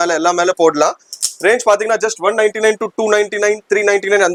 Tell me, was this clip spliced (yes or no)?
no